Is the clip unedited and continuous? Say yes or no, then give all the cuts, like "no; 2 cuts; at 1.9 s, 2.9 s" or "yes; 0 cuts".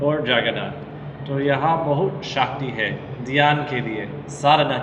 yes; 0 cuts